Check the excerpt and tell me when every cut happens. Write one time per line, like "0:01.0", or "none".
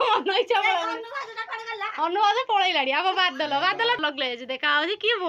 0:04.0

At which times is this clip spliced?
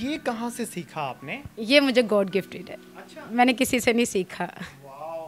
none

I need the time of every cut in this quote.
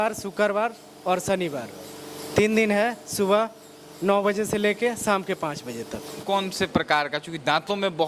0:06.2

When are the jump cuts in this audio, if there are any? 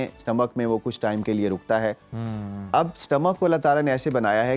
none

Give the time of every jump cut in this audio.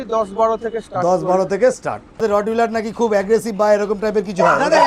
0:01.7

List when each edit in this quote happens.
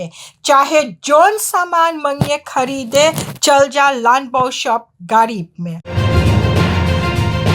0:06.0

